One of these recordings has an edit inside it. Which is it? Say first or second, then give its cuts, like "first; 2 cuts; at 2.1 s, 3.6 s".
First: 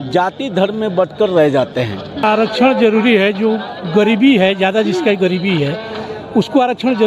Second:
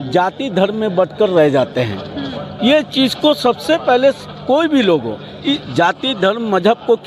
first; 1 cut; at 2.2 s